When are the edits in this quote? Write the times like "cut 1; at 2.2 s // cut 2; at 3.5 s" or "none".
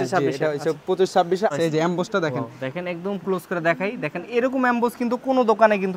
cut 1; at 1.5 s